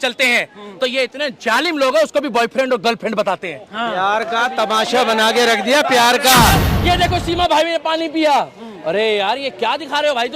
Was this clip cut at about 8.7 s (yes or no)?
no